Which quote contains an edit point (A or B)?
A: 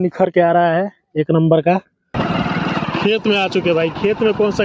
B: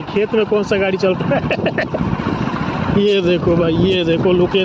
A